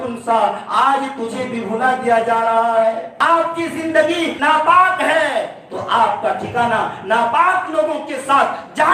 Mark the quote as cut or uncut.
cut